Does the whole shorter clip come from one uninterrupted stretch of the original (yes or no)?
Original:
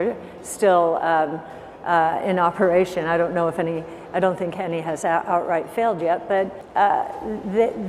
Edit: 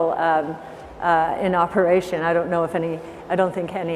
yes